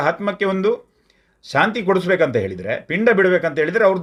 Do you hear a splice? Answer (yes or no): no